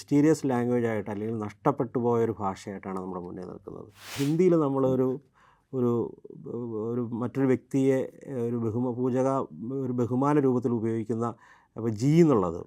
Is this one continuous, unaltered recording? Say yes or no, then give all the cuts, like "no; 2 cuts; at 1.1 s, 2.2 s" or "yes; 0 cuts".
no; 1 cut; at 4.1 s